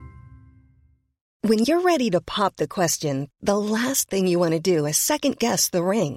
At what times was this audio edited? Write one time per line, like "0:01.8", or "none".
none